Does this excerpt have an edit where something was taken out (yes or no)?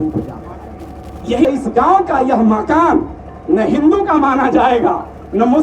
yes